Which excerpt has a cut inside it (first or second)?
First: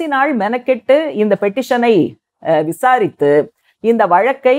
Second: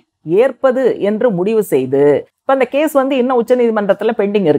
second